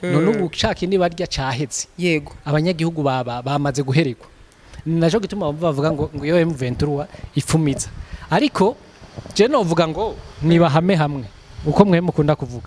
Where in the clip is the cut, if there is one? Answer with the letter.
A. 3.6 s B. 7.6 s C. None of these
C